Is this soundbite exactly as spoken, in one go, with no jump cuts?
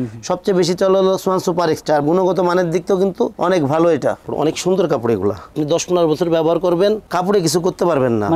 no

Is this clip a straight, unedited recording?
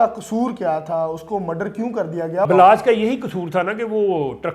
no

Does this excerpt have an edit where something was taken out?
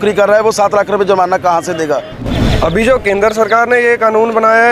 yes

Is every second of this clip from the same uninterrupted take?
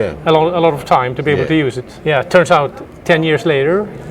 no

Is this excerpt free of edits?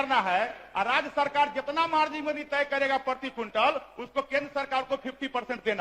yes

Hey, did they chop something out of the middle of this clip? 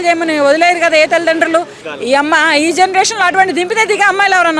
yes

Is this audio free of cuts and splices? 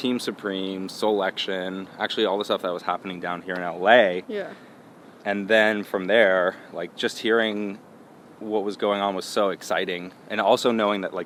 yes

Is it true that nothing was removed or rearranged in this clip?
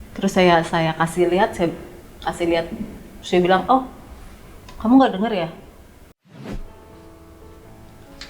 no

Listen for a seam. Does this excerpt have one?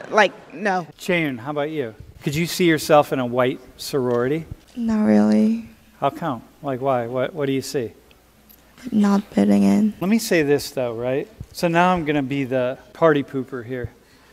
yes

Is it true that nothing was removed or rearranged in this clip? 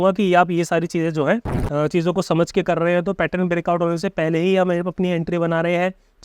no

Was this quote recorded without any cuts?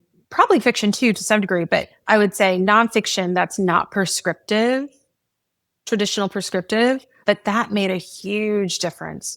no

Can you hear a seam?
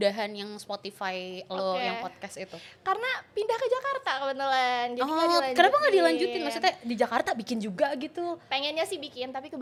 no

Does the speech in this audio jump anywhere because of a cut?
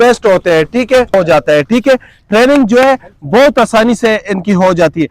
yes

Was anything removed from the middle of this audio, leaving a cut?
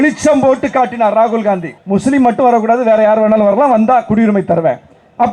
yes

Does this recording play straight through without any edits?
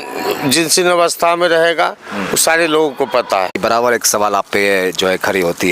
no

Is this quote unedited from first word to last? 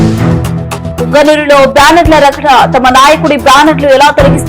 no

